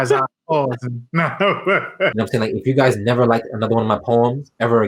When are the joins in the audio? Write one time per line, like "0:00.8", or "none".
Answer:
0:02.1